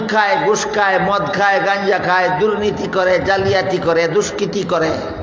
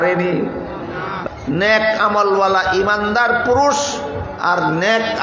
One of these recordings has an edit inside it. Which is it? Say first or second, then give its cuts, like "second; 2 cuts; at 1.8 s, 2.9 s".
second; 1 cut; at 1.2 s